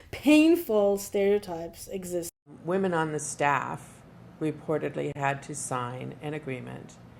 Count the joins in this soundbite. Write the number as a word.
one